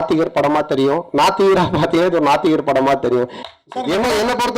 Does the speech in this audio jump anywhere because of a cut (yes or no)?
yes